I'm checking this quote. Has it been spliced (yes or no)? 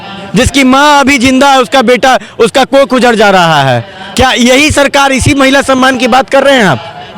no